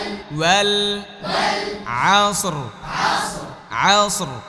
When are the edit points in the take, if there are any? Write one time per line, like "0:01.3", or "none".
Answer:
none